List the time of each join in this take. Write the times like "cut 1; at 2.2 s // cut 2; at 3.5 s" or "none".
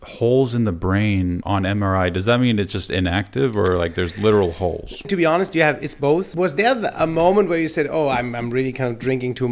cut 1; at 1.4 s // cut 2; at 6.3 s

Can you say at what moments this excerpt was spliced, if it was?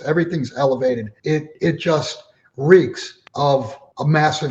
cut 1; at 1.1 s // cut 2; at 3.5 s

